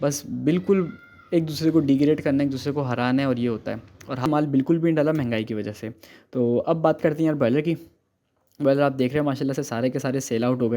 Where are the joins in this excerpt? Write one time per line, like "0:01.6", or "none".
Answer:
0:04.3